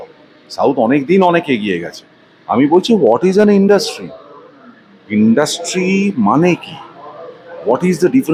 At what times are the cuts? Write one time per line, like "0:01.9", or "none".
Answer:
none